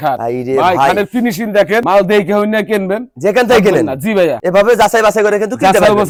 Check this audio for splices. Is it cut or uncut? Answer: uncut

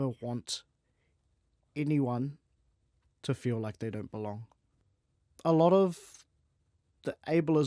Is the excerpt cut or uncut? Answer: cut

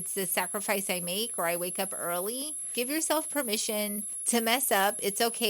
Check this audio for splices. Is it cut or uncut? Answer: cut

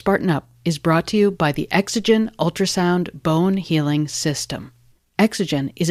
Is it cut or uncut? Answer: uncut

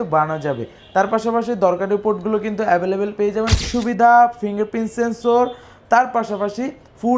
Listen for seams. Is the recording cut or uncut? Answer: cut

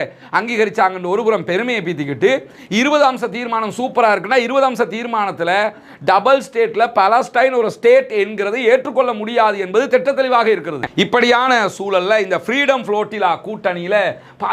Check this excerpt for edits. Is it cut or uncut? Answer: cut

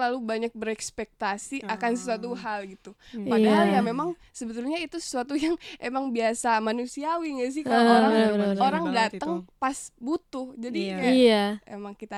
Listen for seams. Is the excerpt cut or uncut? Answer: uncut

